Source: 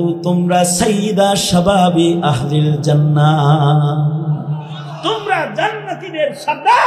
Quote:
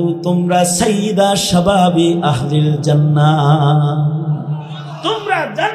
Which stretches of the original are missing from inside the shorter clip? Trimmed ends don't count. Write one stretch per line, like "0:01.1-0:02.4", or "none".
none